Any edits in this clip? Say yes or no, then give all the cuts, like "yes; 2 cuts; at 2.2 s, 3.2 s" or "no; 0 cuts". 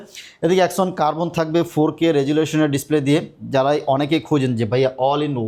no; 0 cuts